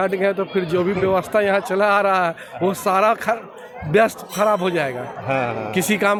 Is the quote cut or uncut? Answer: uncut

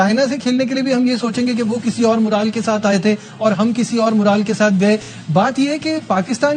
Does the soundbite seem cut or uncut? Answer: uncut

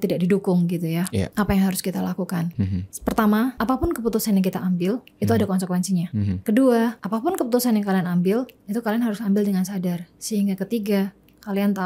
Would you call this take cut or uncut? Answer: uncut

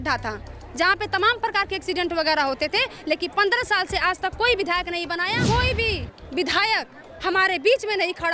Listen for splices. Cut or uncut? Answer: cut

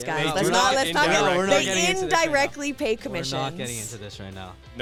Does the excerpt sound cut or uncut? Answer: uncut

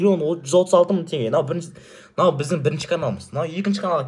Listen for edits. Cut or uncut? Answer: uncut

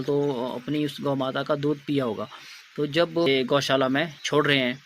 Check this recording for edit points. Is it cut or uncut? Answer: cut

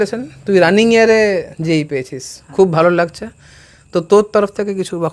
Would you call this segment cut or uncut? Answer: uncut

